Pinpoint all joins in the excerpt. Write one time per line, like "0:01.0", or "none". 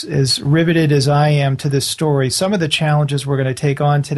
0:02.9